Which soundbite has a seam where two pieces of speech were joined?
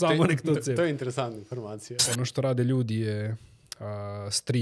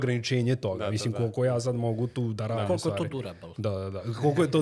first; 1 cut; at 2.0 s

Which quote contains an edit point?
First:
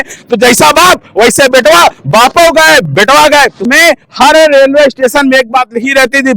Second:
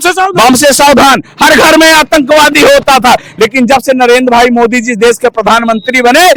first; 1 cut; at 3.6 s

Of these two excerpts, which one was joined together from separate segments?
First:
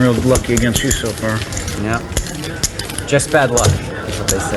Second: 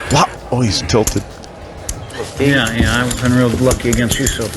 second; 1 cut; at 2.3 s

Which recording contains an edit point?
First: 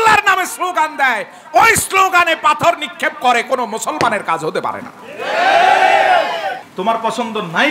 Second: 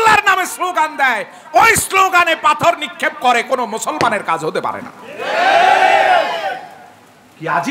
first; 1 cut; at 6.7 s

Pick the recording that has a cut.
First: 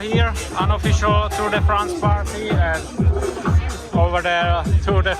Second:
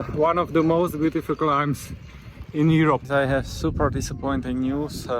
second; 1 cut; at 3.0 s

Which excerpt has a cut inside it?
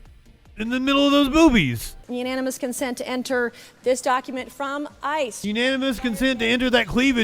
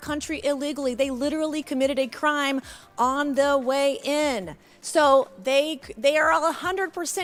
first; 1 cut; at 2.0 s

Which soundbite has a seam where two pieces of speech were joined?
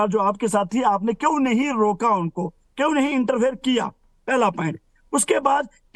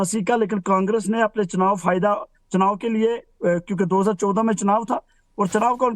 second; 1 cut; at 2.1 s

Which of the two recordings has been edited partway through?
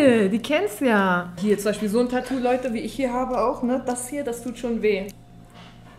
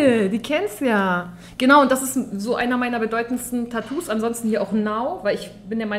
first; 2 cuts; at 1.4 s, 5.1 s

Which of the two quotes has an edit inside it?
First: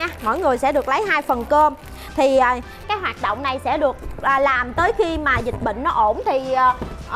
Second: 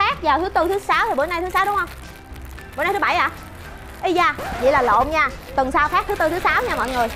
first; 1 cut; at 2.8 s

